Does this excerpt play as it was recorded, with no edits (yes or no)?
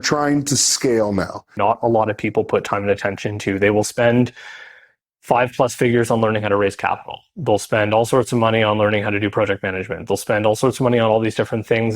no